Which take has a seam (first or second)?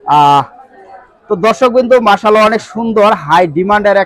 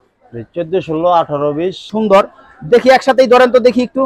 second